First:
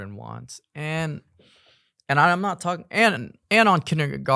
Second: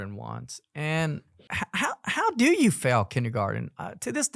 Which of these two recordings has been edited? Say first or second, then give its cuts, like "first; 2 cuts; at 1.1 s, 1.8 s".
second; 1 cut; at 1.4 s